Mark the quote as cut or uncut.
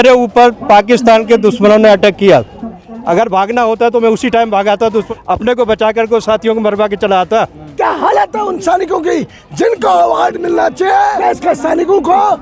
cut